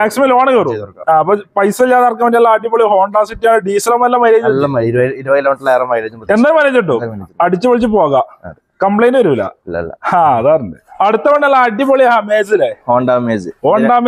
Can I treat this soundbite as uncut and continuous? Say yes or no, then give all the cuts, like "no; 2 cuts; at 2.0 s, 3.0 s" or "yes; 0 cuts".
yes; 0 cuts